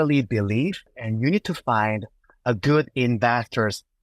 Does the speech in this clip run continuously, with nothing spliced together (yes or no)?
no